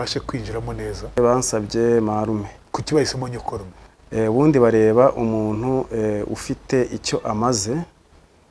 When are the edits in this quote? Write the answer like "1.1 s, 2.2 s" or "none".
1.2 s, 2.6 s